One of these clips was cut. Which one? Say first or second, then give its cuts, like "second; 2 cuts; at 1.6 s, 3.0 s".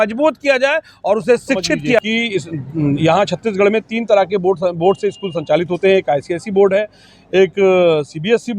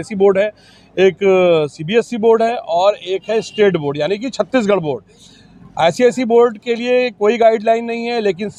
first; 1 cut; at 2.0 s